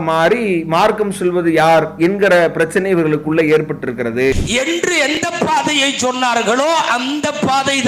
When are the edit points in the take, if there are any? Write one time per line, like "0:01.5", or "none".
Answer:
0:04.3